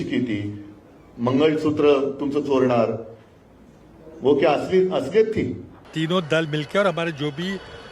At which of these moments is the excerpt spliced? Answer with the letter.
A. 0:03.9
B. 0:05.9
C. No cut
B